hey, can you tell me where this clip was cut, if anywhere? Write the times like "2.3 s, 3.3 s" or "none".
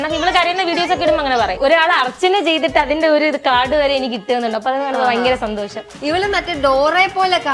1.6 s, 5.9 s